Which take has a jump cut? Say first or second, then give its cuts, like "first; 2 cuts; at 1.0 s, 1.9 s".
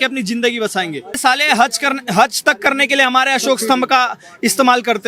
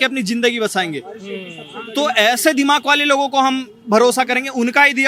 first; 1 cut; at 1.2 s